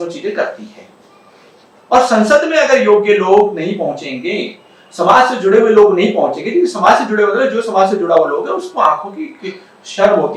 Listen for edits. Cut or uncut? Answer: uncut